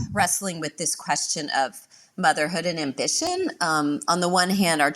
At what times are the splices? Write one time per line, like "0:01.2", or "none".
none